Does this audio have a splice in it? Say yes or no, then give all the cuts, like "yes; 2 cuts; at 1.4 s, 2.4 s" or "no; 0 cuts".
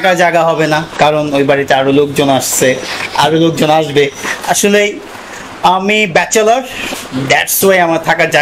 no; 0 cuts